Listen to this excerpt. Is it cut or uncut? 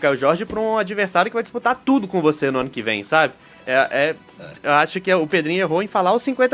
uncut